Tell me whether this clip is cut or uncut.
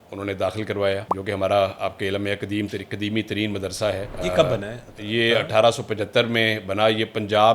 cut